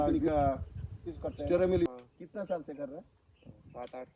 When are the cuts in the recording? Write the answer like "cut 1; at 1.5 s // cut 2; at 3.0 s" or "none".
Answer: cut 1; at 1.9 s